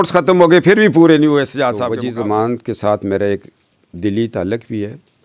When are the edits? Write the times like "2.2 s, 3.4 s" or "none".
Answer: 1.8 s

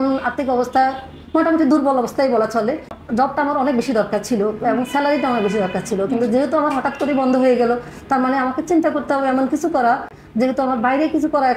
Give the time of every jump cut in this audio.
none

